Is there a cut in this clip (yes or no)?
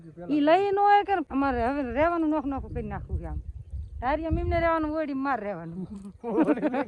yes